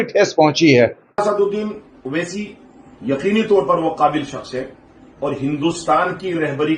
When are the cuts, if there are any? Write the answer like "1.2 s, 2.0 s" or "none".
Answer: 1.1 s